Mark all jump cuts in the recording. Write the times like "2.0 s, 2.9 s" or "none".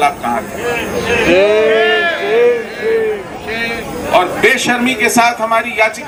none